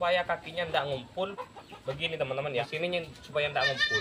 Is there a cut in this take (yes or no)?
yes